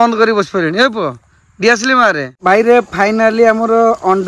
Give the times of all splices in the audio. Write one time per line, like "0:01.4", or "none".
0:02.4